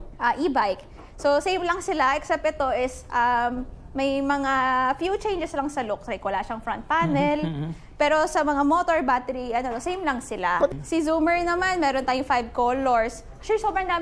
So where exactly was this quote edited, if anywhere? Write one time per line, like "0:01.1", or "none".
0:10.7